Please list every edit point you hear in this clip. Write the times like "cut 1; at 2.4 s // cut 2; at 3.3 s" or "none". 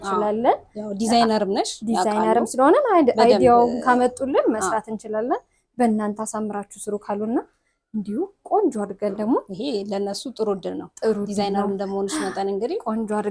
none